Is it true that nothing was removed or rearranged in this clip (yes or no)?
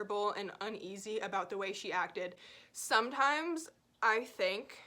yes